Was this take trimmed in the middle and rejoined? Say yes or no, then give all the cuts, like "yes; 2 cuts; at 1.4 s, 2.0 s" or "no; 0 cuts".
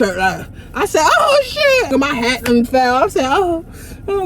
yes; 1 cut; at 1.9 s